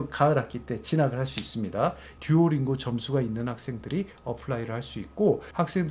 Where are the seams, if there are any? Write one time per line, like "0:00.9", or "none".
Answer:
0:02.1